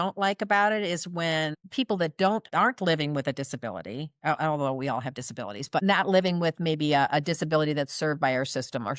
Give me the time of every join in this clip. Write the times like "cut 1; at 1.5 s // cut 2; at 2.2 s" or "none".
cut 1; at 1.6 s // cut 2; at 2.5 s // cut 3; at 5.8 s